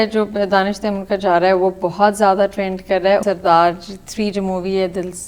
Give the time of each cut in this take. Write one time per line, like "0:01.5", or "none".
0:03.2